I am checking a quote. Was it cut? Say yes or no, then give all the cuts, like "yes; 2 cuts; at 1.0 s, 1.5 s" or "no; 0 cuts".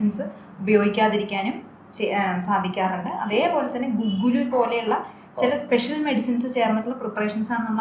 no; 0 cuts